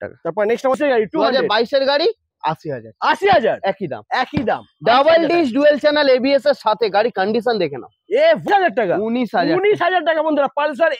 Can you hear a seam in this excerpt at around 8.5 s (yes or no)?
yes